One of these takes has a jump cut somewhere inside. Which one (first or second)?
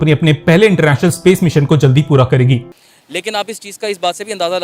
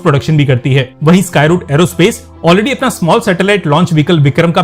first